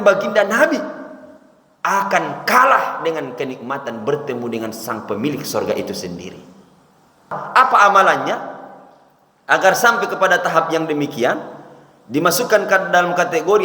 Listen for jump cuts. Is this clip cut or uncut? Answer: cut